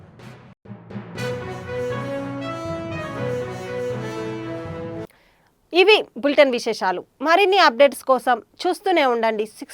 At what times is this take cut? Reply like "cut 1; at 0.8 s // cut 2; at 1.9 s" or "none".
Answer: none